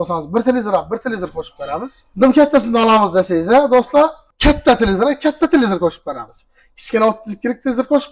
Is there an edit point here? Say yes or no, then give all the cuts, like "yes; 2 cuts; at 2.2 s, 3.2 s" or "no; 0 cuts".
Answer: yes; 2 cuts; at 2.0 s, 4.2 s